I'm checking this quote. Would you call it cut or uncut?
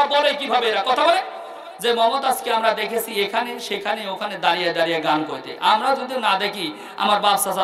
uncut